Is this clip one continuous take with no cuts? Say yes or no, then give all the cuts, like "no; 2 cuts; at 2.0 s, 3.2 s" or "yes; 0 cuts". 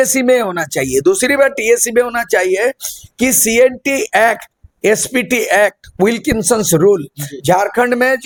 yes; 0 cuts